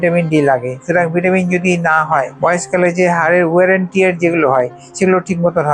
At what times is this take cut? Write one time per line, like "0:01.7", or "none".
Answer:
0:02.3